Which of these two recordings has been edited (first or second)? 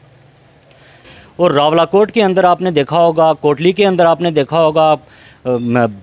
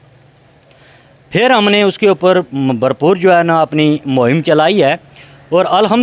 first